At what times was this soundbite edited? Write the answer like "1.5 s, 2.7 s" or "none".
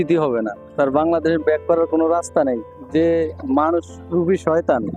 none